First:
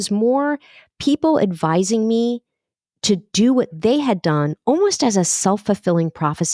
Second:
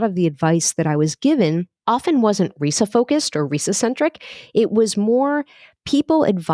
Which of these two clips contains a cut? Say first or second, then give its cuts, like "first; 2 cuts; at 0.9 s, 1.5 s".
second; 1 cut; at 1.7 s